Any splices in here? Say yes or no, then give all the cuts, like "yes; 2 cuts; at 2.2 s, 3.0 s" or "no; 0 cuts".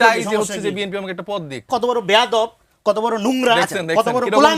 yes; 1 cut; at 1.7 s